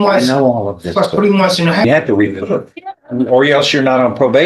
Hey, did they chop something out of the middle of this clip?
yes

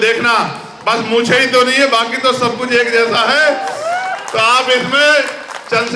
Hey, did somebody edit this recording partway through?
no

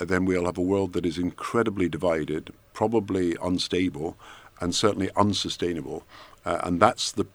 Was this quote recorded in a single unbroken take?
yes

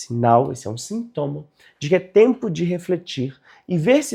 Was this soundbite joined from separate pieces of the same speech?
no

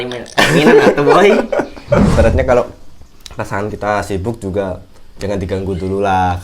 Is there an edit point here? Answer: yes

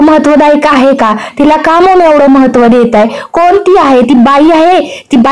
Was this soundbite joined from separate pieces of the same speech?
no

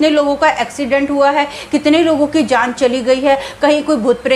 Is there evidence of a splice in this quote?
no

